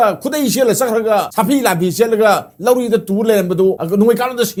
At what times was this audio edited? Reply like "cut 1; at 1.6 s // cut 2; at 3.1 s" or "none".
none